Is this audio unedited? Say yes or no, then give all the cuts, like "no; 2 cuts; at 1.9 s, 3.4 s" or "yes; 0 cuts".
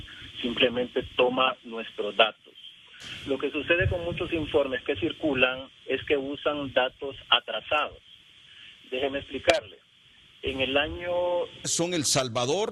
yes; 0 cuts